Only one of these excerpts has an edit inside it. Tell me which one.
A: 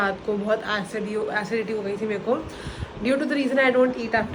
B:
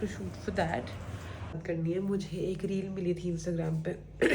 B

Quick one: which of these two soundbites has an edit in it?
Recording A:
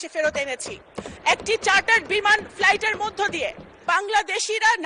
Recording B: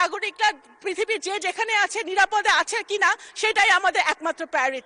A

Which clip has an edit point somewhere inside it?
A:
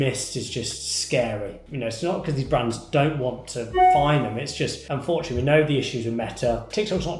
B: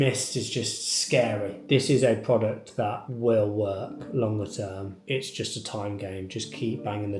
B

